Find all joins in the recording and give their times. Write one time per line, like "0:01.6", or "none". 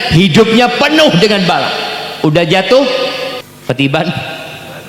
0:03.5